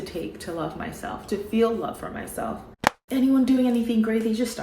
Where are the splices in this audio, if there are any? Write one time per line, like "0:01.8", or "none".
0:03.0

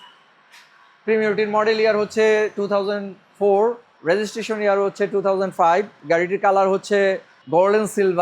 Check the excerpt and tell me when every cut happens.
0:03.9
0:07.3

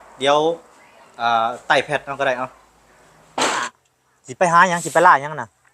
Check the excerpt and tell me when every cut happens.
0:03.7

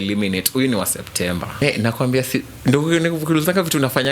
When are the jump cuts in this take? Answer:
0:01.6

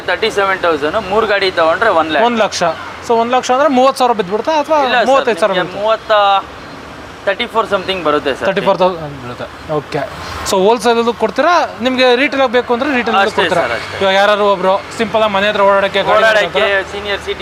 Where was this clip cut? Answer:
none

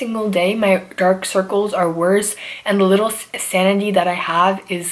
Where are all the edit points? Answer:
none

